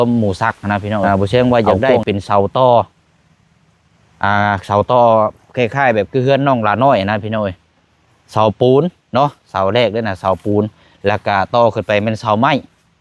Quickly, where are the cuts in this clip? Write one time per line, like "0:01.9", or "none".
0:01.0